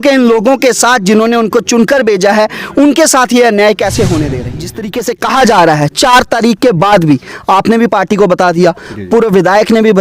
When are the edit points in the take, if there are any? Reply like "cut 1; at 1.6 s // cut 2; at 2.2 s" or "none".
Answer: cut 1; at 4.8 s